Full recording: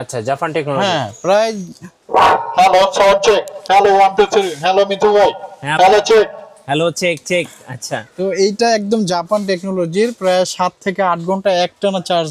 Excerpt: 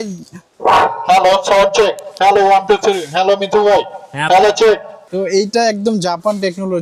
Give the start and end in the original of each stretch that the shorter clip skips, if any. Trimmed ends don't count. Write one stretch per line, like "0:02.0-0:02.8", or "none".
0:06.5-0:08.0